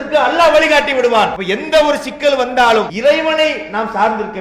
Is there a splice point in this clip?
yes; 2 cuts; at 1.4 s, 2.9 s

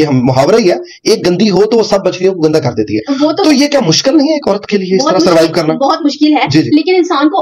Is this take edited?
no; 0 cuts

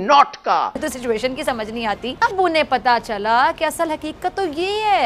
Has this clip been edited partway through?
yes; 2 cuts; at 0.9 s, 2.2 s

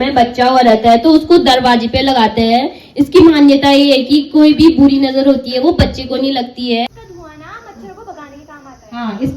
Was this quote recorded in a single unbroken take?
no; 1 cut; at 6.9 s

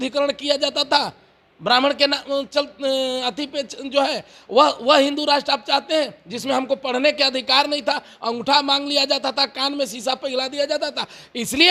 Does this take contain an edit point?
no; 0 cuts

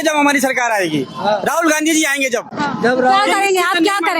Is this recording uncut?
yes; 0 cuts

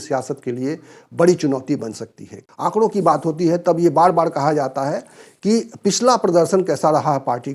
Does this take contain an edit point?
yes; 1 cut; at 2.4 s

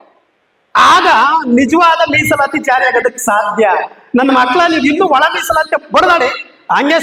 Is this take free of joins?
yes; 0 cuts

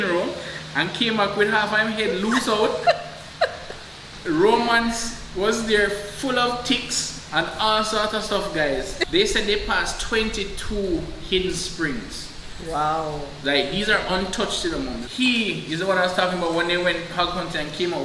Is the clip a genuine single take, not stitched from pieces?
no; 2 cuts; at 9.0 s, 15.0 s

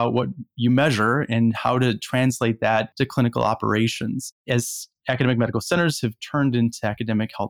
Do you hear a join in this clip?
no; 0 cuts

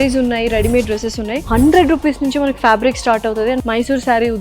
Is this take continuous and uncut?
no; 2 cuts; at 1.3 s, 3.6 s

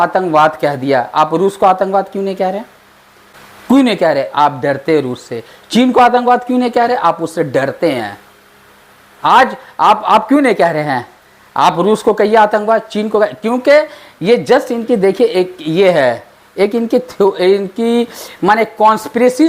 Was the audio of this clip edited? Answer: no; 0 cuts

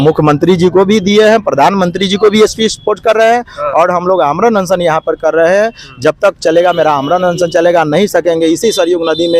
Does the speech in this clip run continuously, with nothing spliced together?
yes; 0 cuts

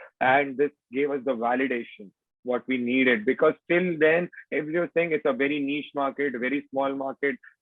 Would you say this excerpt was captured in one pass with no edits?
yes; 0 cuts

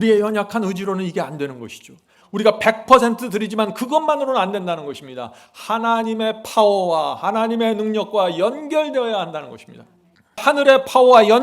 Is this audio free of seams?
no; 1 cut; at 10.4 s

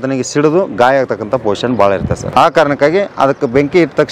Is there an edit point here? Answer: yes; 1 cut; at 2.2 s

